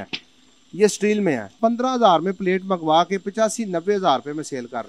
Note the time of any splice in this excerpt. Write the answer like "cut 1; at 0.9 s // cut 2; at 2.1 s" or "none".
cut 1; at 1.6 s